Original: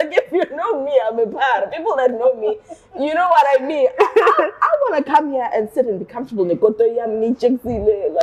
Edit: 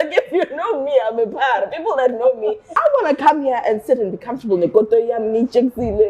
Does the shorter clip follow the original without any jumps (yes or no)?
no